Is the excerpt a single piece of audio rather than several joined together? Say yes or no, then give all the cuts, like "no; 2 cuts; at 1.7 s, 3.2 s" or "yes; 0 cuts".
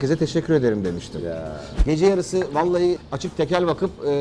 no; 2 cuts; at 1.6 s, 3.0 s